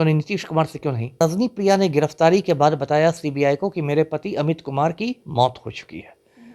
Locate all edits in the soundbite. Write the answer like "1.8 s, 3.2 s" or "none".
1.2 s